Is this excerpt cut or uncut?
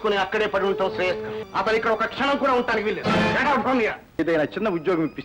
cut